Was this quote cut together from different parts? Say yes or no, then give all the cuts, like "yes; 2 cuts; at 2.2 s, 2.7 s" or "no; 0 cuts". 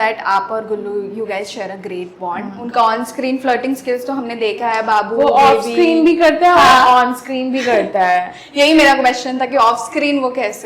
no; 0 cuts